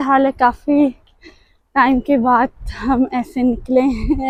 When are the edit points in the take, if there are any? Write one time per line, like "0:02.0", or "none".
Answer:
none